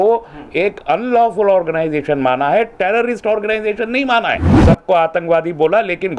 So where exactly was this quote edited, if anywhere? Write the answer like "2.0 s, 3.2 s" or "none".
4.5 s